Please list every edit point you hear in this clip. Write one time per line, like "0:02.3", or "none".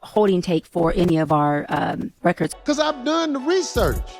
0:02.5